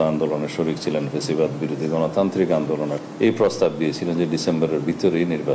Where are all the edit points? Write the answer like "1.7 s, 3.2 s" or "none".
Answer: 3.0 s